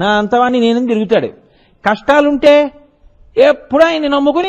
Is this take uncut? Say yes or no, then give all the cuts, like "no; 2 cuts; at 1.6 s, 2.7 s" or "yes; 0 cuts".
yes; 0 cuts